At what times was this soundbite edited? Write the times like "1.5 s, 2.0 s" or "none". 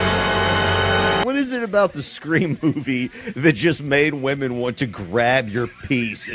1.2 s